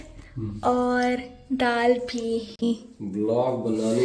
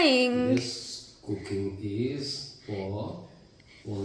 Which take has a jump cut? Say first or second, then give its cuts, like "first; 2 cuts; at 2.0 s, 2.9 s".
first; 1 cut; at 2.6 s